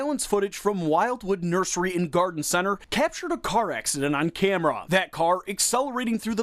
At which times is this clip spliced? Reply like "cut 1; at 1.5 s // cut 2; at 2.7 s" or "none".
cut 1; at 4.9 s